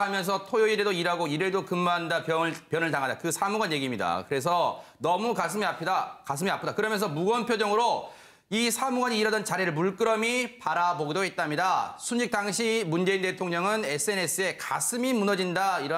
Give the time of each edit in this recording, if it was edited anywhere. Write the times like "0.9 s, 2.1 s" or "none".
5.7 s